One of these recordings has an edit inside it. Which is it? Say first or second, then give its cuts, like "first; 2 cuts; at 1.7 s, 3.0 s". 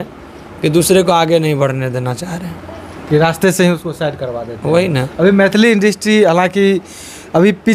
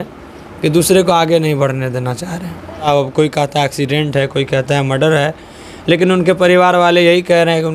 second; 1 cut; at 2.8 s